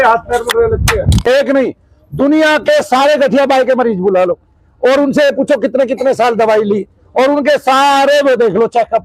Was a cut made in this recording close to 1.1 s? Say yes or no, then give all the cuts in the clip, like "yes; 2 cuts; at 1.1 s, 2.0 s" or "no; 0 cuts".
yes; 1 cut; at 1.1 s